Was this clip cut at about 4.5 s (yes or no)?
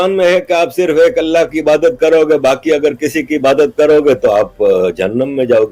no